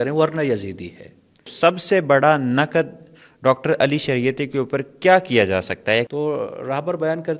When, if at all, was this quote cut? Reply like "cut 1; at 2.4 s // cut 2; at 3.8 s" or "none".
cut 1; at 1.5 s // cut 2; at 6.1 s